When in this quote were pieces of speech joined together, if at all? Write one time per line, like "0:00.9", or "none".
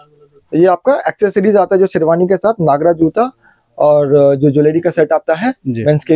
none